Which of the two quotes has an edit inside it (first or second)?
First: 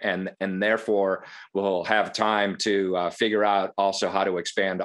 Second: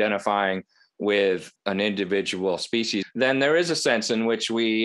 second